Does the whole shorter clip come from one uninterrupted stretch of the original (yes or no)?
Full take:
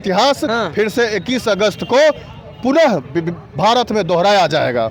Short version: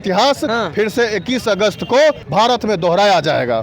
no